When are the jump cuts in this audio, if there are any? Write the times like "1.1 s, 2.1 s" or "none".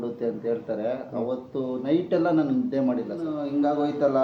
3.2 s